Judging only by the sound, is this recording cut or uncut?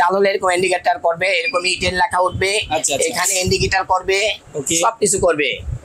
uncut